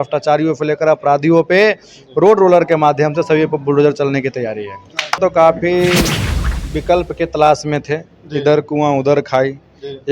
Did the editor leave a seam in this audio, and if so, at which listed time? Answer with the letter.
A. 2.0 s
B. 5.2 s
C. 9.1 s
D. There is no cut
B